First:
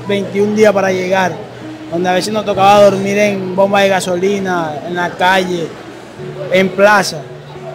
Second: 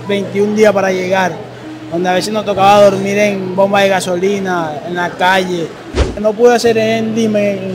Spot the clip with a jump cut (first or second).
second